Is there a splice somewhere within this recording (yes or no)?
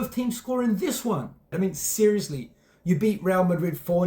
yes